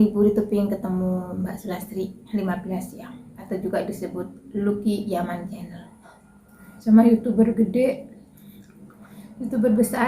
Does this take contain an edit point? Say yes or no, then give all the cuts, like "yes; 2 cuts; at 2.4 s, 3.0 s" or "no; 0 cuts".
yes; 2 cuts; at 3.3 s, 6.7 s